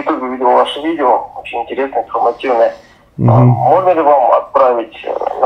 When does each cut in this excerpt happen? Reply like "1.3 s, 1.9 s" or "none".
none